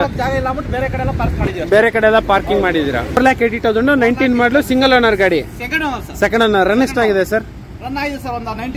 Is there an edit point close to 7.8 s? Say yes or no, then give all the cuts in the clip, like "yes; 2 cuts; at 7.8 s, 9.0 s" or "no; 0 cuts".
no; 1 cut; at 3.2 s